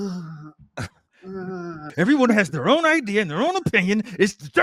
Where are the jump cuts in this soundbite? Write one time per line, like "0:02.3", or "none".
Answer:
0:01.8